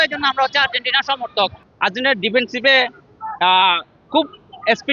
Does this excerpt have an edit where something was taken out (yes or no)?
yes